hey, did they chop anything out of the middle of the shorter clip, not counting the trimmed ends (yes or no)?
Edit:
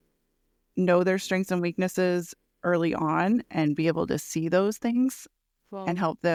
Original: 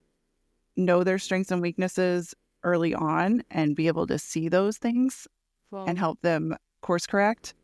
no